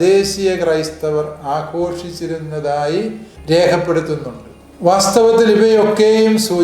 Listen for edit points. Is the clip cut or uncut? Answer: uncut